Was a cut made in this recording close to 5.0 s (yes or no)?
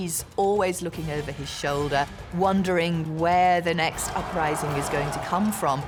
no